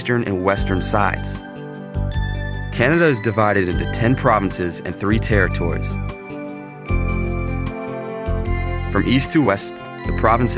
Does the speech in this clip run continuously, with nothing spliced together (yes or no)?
yes